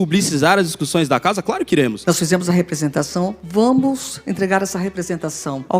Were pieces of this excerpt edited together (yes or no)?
yes